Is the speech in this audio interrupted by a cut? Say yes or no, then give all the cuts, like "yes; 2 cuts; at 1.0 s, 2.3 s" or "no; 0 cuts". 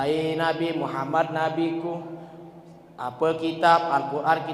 no; 0 cuts